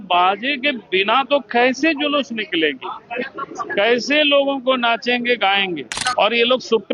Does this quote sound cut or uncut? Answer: cut